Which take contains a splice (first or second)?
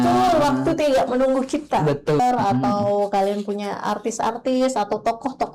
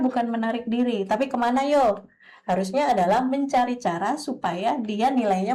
first